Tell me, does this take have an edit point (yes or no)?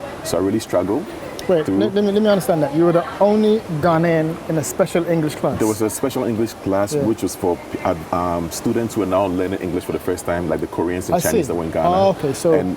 no